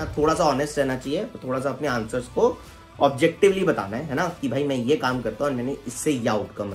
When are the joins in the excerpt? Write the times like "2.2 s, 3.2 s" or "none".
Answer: none